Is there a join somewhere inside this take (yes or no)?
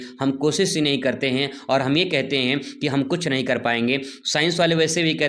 no